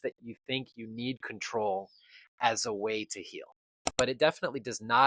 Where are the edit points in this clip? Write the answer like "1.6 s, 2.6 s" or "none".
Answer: 3.9 s

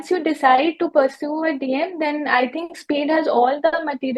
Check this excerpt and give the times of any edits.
none

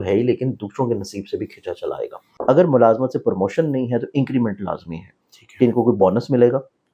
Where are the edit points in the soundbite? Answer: 2.2 s

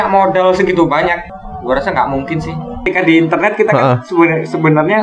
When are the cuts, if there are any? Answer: 1.3 s, 2.8 s

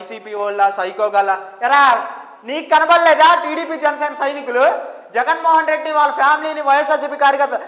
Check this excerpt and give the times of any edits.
none

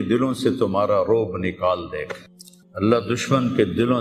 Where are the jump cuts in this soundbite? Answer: none

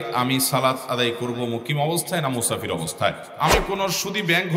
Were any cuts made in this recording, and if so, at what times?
3.3 s

